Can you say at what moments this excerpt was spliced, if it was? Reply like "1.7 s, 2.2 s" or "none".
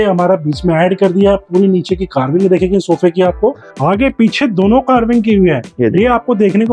3.7 s